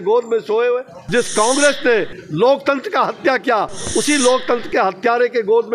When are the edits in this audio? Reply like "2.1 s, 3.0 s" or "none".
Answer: 1.0 s